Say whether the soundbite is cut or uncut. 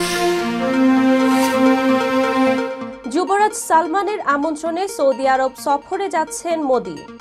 uncut